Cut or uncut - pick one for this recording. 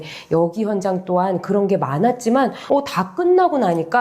cut